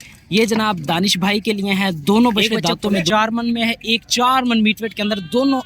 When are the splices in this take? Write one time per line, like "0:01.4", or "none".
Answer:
0:03.1